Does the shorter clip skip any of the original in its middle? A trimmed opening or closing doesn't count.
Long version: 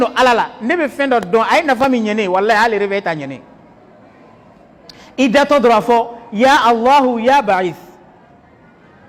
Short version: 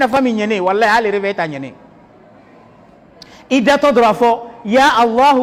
no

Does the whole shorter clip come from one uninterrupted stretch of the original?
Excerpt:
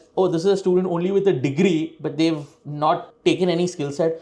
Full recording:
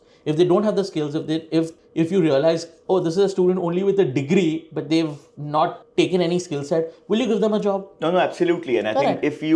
yes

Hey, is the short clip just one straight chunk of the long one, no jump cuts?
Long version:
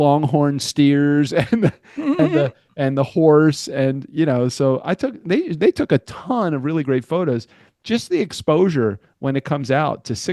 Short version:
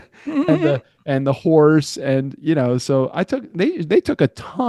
yes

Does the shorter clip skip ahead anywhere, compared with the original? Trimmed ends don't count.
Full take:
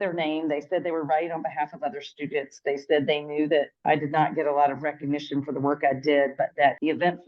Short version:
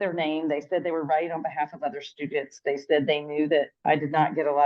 no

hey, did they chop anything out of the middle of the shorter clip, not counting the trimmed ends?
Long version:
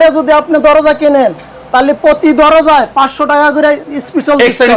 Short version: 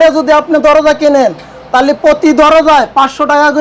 no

